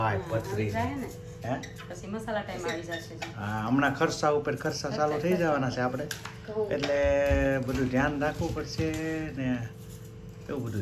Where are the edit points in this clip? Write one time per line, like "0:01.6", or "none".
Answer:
none